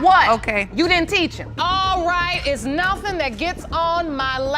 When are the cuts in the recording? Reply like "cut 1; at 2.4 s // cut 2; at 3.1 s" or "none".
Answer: cut 1; at 1.5 s

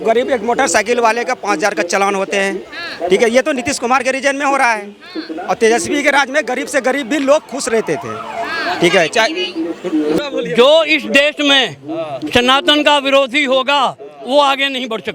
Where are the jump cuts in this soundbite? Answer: cut 1; at 10.2 s

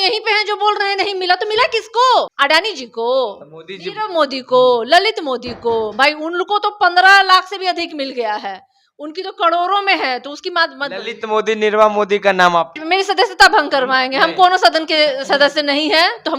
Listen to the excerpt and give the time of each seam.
cut 1; at 2.3 s // cut 2; at 12.8 s

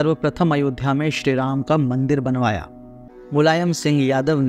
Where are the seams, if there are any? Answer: cut 1; at 3.1 s

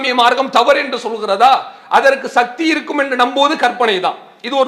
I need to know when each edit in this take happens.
none

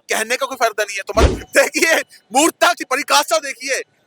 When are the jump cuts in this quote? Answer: cut 1; at 1.3 s

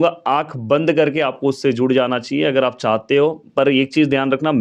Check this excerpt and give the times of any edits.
none

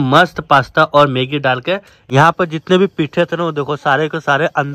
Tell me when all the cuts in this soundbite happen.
cut 1; at 2.0 s

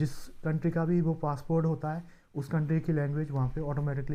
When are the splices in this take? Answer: none

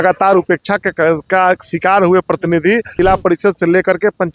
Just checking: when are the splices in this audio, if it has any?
cut 1; at 2.9 s

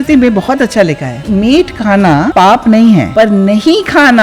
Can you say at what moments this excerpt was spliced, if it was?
cut 1; at 1.2 s // cut 2; at 2.3 s // cut 3; at 3.1 s

